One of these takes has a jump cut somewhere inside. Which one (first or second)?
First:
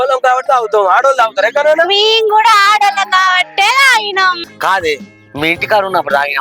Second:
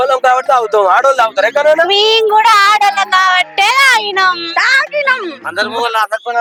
first